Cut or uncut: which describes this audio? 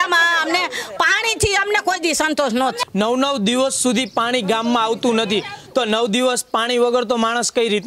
cut